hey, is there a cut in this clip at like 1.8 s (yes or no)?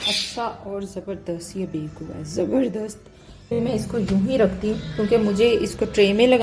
no